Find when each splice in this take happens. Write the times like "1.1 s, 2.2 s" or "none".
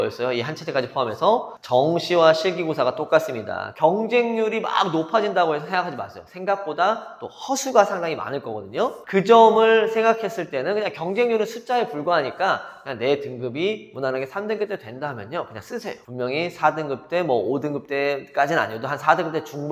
1.5 s, 3.7 s